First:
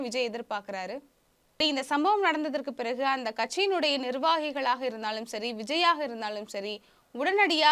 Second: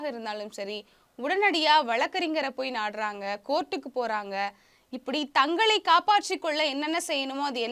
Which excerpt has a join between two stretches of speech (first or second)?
first